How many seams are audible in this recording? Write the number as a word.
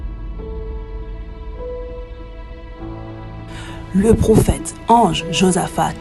one